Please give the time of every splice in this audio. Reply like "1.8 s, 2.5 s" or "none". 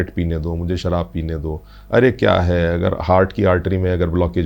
none

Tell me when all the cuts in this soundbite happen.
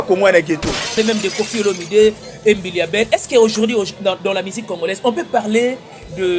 0.9 s

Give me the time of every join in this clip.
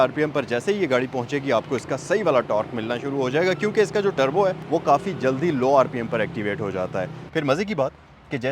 7.2 s

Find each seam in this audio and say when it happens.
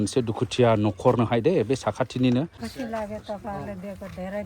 2.6 s

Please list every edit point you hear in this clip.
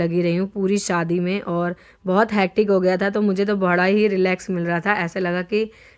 none

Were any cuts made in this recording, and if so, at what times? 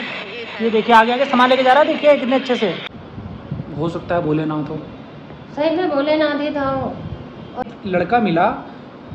2.8 s, 7.6 s

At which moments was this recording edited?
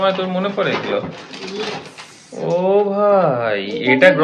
none

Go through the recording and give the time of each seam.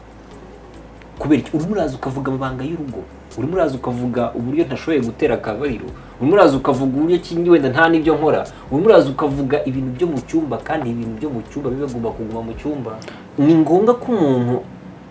13.4 s

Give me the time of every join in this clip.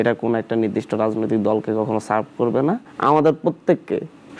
2.9 s

